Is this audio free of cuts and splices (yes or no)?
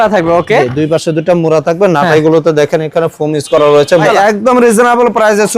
no